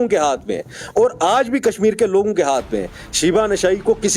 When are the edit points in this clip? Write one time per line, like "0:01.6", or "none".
none